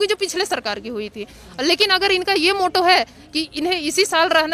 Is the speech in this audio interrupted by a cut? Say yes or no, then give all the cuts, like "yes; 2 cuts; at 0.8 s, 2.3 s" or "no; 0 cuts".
no; 0 cuts